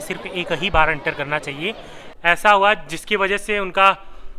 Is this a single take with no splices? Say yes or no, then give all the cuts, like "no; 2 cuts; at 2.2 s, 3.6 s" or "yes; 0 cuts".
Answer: no; 1 cut; at 2.0 s